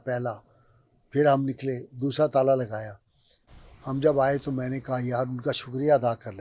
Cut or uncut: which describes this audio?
uncut